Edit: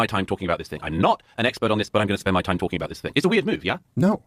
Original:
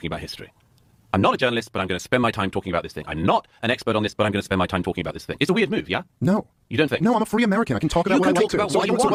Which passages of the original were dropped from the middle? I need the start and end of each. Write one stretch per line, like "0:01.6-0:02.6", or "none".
none